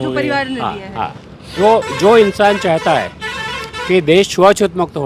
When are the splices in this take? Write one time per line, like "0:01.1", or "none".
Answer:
0:01.5